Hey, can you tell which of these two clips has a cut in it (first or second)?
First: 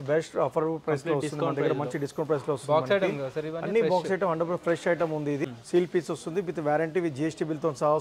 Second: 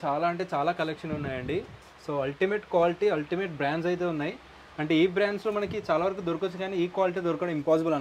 first